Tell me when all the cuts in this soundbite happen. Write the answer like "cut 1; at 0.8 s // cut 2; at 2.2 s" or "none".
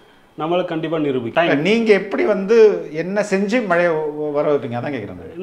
cut 1; at 1.3 s